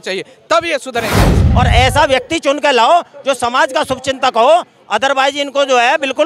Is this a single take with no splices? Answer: no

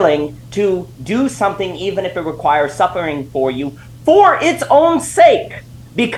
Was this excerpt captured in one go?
yes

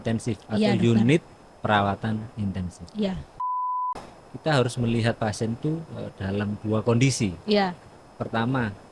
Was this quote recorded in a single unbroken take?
no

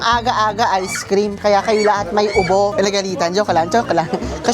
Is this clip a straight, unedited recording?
no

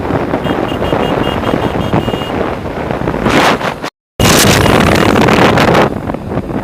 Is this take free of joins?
yes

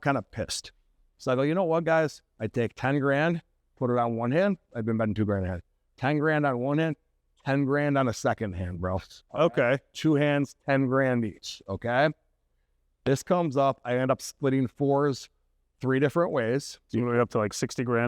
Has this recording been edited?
yes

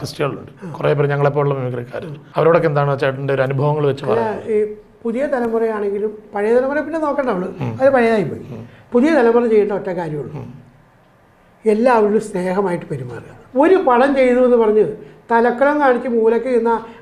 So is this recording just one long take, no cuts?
yes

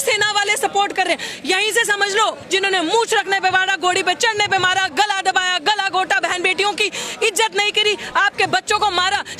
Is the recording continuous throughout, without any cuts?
no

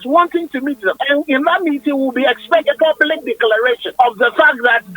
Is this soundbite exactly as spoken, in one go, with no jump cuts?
no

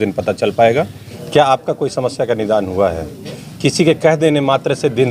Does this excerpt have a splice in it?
yes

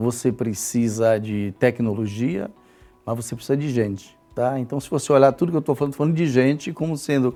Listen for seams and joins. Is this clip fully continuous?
yes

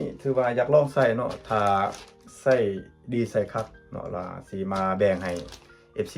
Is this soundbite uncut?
yes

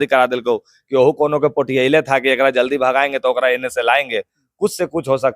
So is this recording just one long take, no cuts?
yes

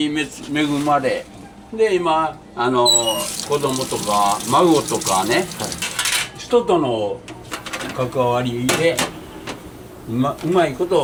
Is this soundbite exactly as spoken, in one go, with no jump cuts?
yes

